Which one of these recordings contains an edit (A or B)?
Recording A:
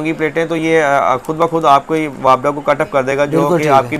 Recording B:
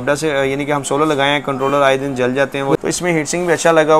B